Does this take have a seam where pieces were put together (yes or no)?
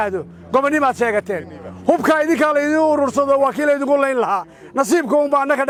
no